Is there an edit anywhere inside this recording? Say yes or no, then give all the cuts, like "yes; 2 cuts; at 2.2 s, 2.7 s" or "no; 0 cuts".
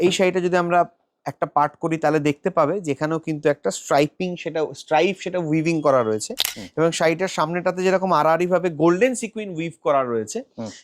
no; 0 cuts